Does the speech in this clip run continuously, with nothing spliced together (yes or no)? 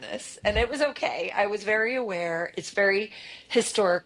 yes